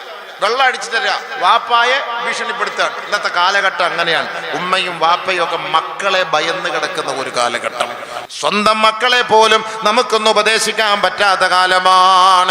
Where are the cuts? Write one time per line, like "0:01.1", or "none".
0:08.2